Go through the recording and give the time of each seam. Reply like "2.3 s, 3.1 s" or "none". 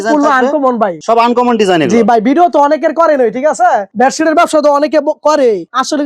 none